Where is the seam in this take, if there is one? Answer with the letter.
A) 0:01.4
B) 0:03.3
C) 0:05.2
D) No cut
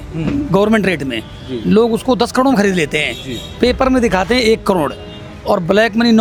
D